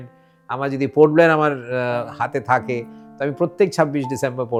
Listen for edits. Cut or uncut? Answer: uncut